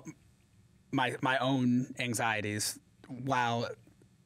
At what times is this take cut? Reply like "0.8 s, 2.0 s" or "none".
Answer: none